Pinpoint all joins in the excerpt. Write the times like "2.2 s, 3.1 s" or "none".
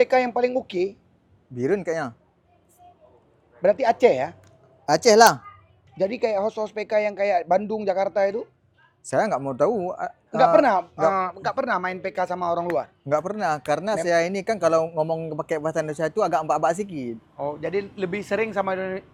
none